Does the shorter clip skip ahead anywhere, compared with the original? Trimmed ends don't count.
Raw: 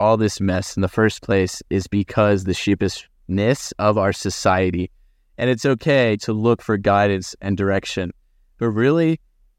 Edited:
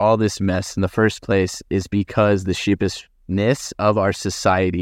no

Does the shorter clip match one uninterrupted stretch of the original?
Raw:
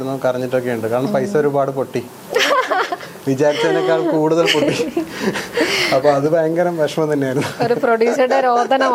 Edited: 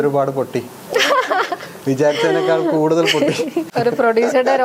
no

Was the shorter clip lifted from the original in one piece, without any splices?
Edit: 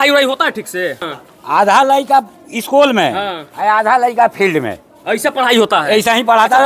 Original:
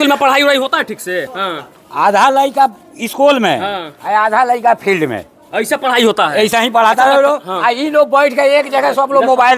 no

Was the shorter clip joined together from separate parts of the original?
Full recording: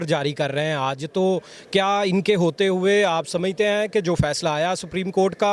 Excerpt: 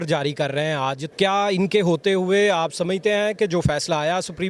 yes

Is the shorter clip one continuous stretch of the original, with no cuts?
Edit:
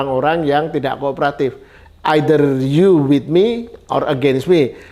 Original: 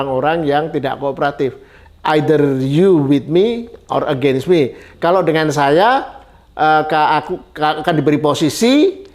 yes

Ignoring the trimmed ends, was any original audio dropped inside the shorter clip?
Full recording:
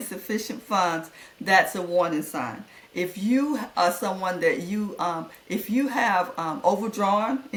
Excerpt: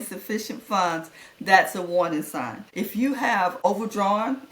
yes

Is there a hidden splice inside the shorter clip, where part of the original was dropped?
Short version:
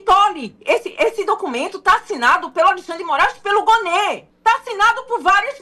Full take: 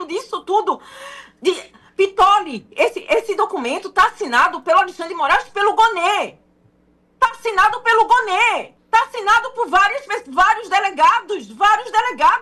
yes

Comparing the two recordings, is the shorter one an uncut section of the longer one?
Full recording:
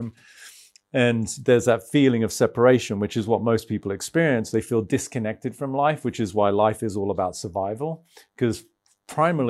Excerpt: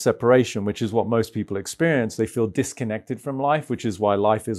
yes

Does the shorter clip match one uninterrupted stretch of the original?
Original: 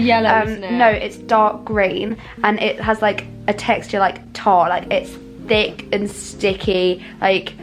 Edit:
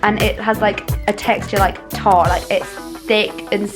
yes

